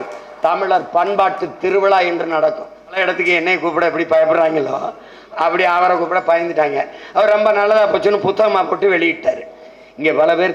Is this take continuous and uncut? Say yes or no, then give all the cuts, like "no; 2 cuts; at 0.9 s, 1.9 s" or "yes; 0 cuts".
no; 2 cuts; at 3.0 s, 9.6 s